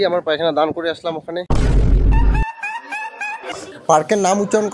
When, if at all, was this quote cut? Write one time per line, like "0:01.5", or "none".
none